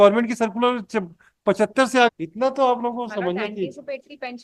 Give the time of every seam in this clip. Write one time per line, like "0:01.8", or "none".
0:02.1